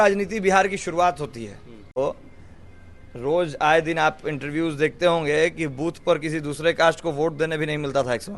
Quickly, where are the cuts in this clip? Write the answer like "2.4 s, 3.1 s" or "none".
2.0 s